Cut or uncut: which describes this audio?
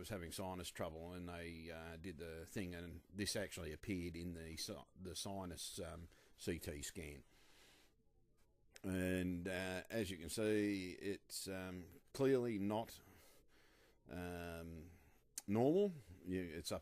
cut